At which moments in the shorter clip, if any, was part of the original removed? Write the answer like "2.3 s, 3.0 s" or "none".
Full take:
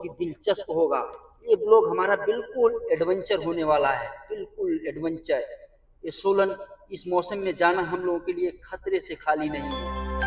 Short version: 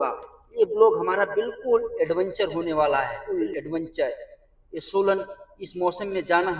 3.2 s